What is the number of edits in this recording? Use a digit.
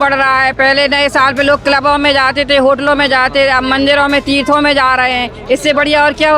0